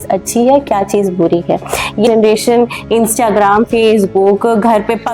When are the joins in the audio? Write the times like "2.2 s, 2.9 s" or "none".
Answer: 2.1 s